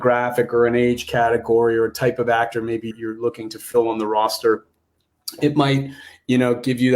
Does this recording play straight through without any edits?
no; 1 cut; at 2.9 s

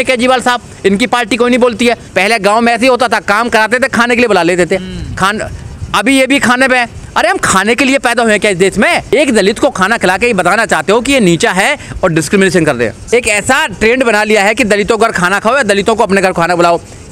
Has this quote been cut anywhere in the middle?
yes; 3 cuts; at 2.1 s, 9.1 s, 13.0 s

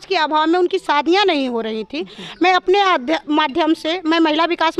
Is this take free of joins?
yes; 0 cuts

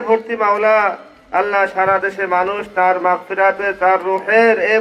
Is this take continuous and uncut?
yes; 0 cuts

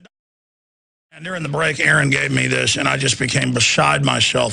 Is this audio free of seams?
yes; 0 cuts

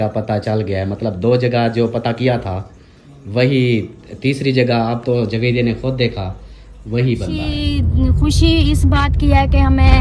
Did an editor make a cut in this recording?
yes; 1 cut; at 7.5 s

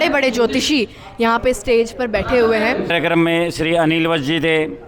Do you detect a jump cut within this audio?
yes; 1 cut; at 2.9 s

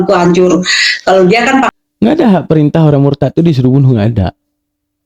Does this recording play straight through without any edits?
no; 1 cut; at 1.7 s

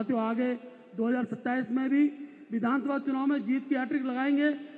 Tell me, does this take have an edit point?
no; 0 cuts

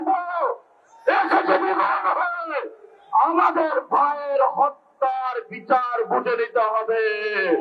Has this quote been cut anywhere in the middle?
no; 0 cuts

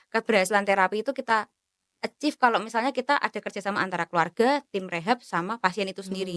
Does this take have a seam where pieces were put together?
no; 0 cuts

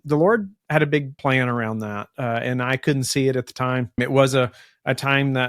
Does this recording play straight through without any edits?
no; 2 cuts; at 1.1 s, 4.0 s

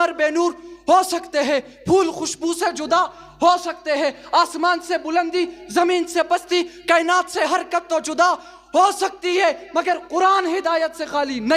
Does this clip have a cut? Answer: no; 0 cuts

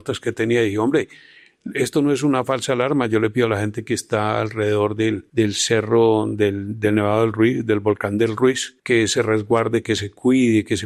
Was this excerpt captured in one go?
yes; 0 cuts

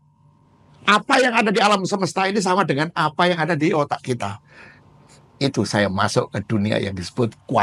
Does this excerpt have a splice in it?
no; 0 cuts

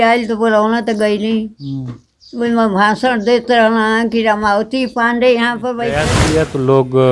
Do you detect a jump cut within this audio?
yes; 1 cut; at 6.1 s

